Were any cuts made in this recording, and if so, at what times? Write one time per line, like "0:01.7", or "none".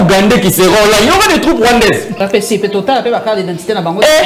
0:02.1